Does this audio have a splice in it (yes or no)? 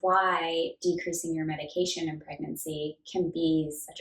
no